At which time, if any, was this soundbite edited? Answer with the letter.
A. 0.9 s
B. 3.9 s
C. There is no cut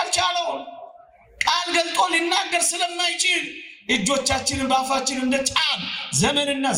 C